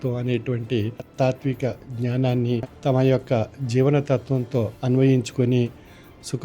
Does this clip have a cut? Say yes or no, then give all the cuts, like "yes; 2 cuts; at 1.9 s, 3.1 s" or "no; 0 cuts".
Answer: yes; 3 cuts; at 1.0 s, 2.7 s, 4.8 s